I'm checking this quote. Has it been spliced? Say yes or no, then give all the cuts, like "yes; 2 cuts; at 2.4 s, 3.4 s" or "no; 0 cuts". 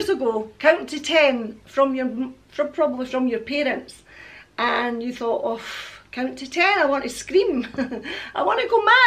no; 0 cuts